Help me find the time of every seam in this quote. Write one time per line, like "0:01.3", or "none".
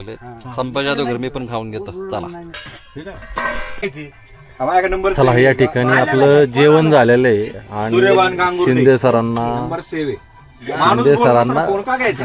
none